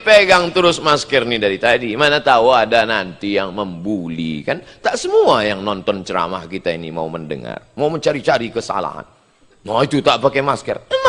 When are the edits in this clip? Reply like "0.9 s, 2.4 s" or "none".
none